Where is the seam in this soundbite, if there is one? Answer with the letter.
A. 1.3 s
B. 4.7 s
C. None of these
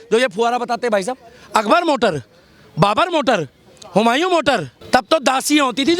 B